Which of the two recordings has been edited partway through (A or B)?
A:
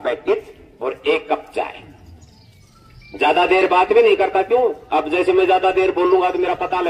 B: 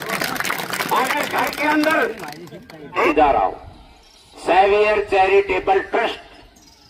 B